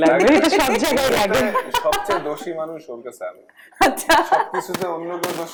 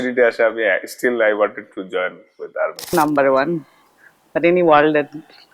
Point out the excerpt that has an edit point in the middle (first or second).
second